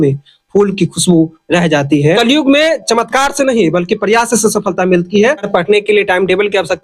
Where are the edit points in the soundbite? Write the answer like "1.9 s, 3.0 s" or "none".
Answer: 2.2 s, 5.4 s